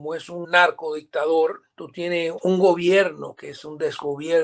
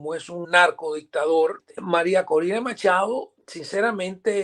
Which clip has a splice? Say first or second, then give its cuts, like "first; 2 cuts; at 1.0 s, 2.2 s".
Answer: second; 1 cut; at 1.7 s